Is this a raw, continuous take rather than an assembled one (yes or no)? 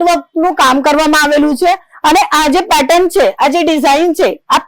yes